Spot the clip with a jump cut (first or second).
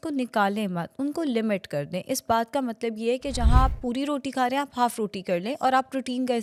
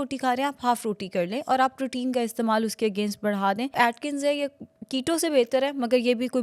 second